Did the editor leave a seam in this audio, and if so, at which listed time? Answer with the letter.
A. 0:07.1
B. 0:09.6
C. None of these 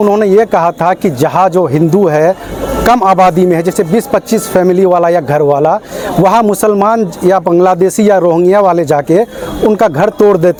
C